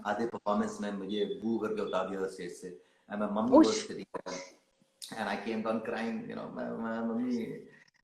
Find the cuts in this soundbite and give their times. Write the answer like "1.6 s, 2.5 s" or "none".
none